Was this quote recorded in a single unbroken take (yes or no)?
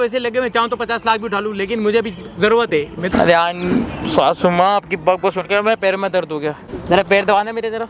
no